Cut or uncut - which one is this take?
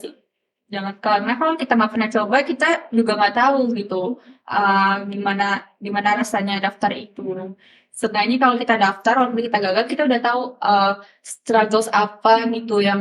uncut